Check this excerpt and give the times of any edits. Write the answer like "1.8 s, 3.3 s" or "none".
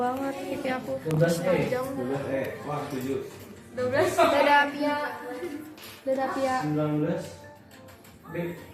none